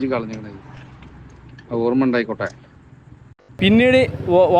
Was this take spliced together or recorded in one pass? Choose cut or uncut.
cut